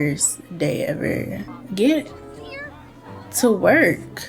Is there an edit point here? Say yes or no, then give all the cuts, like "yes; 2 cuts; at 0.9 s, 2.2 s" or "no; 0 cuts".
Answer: no; 0 cuts